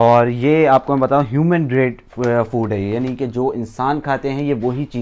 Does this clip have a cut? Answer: no; 0 cuts

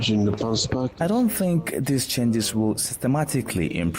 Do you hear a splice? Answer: yes; 1 cut; at 0.9 s

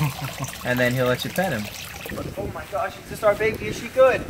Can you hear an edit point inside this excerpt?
yes; 1 cut; at 2.0 s

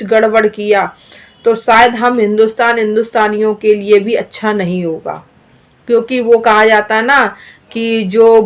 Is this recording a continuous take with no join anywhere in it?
yes; 0 cuts

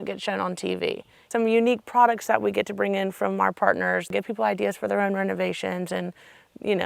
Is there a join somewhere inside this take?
yes; 2 cuts; at 1.1 s, 4.1 s

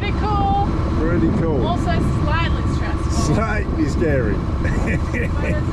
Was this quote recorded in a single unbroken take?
yes; 0 cuts

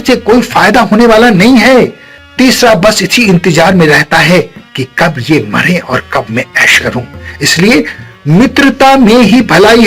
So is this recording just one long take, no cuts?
no; 1 cut; at 2.1 s

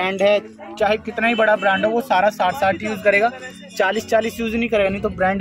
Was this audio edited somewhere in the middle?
no; 0 cuts

